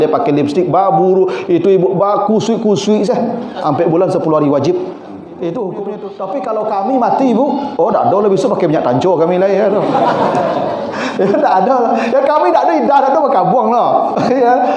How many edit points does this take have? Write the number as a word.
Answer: one